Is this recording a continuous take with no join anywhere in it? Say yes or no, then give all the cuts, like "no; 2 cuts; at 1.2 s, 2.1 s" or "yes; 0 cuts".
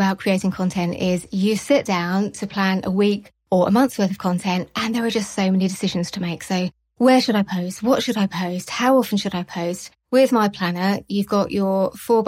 yes; 0 cuts